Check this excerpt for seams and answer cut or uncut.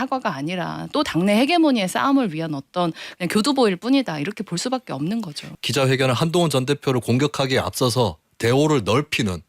cut